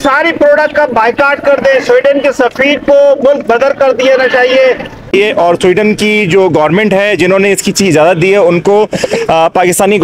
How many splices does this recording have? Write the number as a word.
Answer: one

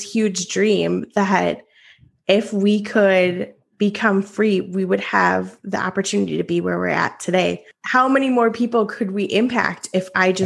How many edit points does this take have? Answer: one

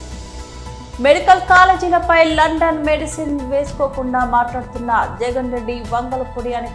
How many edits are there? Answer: one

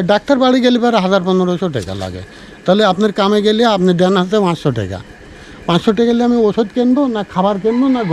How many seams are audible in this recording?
zero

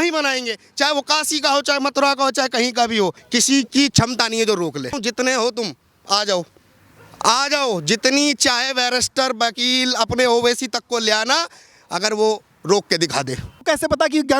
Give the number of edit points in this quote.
three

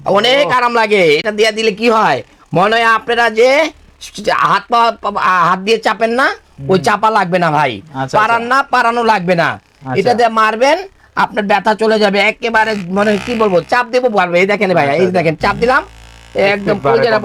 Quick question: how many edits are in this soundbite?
zero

